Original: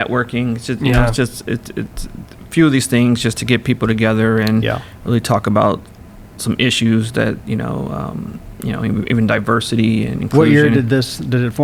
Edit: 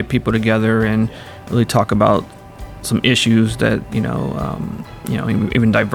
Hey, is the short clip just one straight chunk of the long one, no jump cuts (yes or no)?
yes